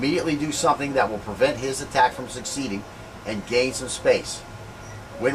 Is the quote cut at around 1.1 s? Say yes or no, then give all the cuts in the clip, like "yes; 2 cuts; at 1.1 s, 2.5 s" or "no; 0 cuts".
no; 1 cut; at 3.3 s